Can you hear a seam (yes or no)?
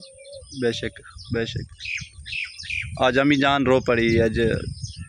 no